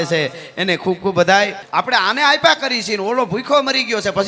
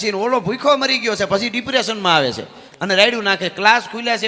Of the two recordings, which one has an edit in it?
first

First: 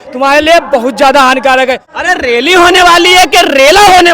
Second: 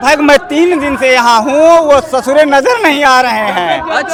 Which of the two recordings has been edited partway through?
first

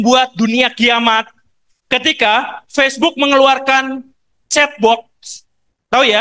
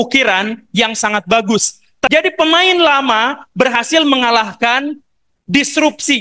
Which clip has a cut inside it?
second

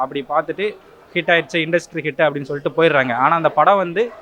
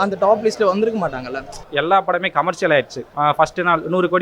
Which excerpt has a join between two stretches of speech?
second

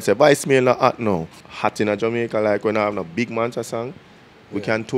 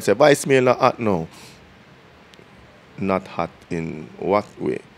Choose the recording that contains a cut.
first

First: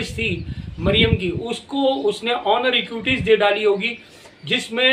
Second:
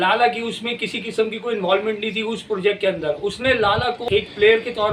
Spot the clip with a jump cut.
second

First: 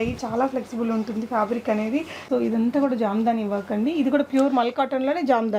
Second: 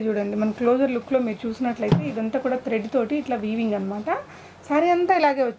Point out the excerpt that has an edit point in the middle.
first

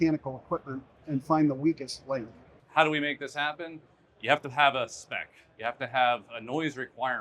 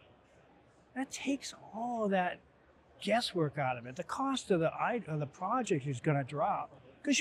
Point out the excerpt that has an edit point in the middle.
first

